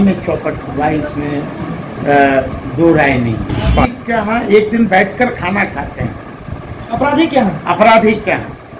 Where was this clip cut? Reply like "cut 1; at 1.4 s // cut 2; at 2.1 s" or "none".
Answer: cut 1; at 4.0 s